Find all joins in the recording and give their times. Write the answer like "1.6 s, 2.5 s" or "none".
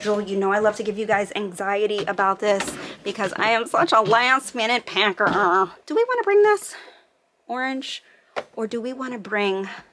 5.8 s